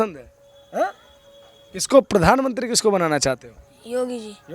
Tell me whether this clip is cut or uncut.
uncut